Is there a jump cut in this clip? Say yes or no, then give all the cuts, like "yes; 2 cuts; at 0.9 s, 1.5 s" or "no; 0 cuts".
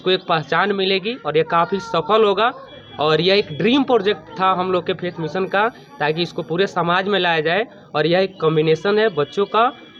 no; 0 cuts